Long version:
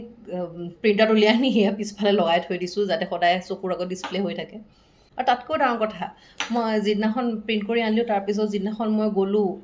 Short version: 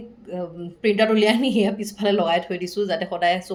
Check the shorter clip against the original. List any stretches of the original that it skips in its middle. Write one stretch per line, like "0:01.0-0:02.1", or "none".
none